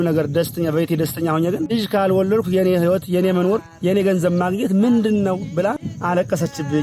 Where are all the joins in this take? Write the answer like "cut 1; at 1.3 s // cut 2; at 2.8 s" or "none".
cut 1; at 1.7 s // cut 2; at 3.7 s // cut 3; at 5.9 s